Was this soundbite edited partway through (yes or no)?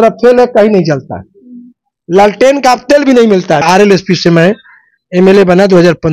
yes